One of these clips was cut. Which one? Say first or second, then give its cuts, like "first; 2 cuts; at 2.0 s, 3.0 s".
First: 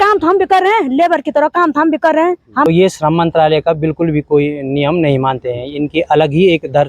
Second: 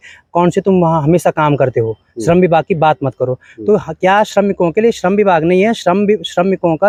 first; 1 cut; at 2.6 s